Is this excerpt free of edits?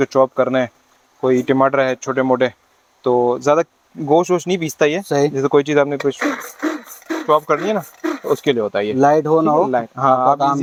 yes; 0 cuts

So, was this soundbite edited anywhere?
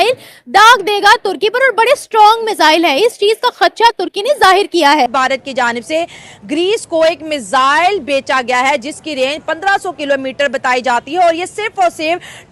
yes; 1 cut; at 5.1 s

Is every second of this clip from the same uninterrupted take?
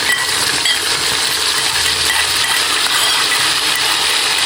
yes; 0 cuts

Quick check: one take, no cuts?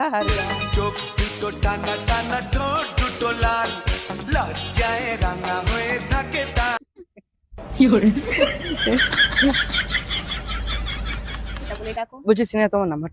yes; 0 cuts

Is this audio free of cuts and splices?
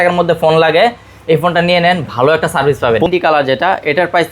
no; 1 cut; at 3.1 s

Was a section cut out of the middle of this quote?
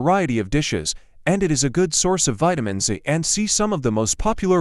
no; 0 cuts

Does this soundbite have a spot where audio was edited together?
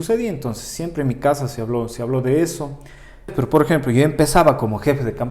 yes; 1 cut; at 3.3 s

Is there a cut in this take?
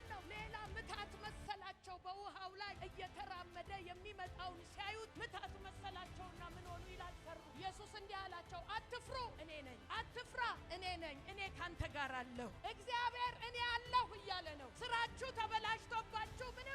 no; 0 cuts

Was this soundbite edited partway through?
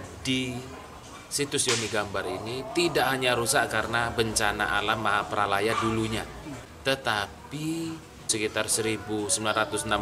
yes; 2 cuts; at 6.6 s, 8.3 s

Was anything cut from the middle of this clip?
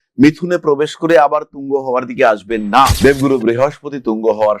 yes; 1 cut; at 2.9 s

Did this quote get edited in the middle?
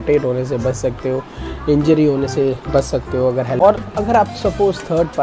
yes; 1 cut; at 3.5 s

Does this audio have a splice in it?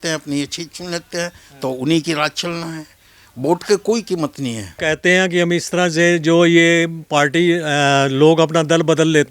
yes; 1 cut; at 4.8 s

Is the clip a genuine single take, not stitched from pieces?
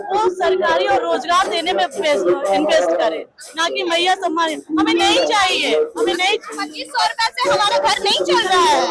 yes; 0 cuts

